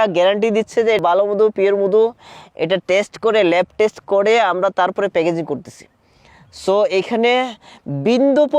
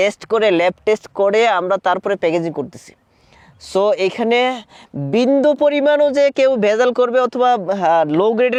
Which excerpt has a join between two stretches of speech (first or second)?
first